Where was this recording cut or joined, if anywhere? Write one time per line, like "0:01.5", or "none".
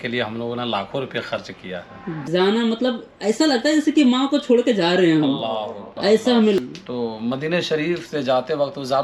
0:02.2
0:06.6

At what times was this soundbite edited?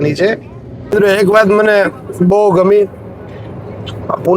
0:00.9

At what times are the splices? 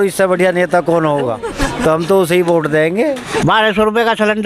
0:01.5
0:03.3

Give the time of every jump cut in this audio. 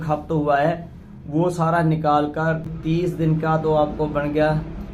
0:02.7

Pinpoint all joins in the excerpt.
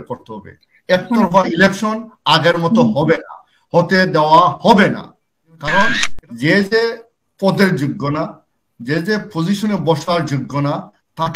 0:06.1

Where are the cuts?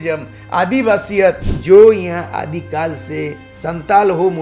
0:01.5

